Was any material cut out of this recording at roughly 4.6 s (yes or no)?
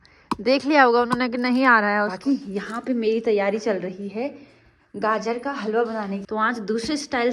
no